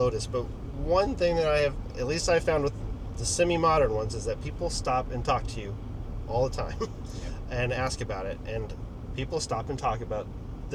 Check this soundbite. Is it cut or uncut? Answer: uncut